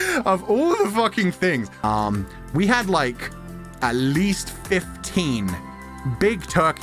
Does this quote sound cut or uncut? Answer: cut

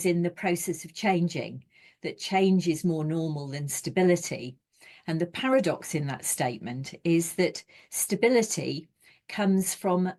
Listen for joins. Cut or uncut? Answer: uncut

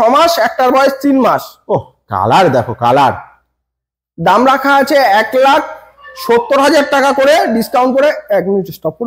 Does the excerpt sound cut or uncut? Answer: uncut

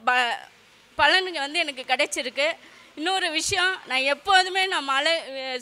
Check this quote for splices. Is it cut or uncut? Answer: uncut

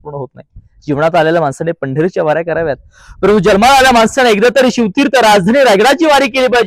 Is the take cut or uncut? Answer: uncut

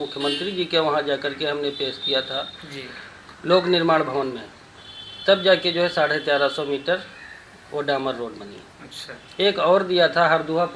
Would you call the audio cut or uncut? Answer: uncut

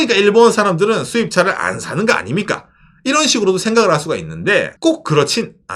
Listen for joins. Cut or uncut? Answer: cut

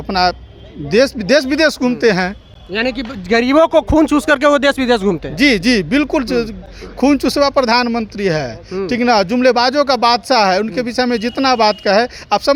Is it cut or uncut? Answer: uncut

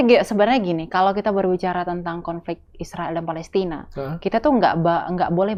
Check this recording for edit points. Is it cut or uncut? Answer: uncut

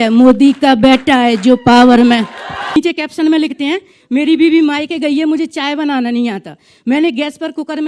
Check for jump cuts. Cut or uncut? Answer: cut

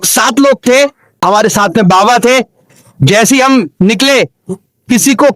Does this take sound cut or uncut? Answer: cut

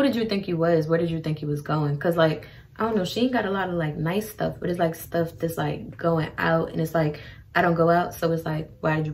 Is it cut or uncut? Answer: uncut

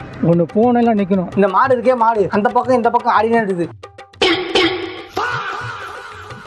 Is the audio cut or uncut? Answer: uncut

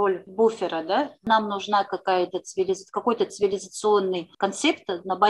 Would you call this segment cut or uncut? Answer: cut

